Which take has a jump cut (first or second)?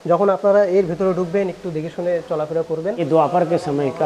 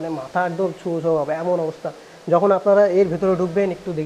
first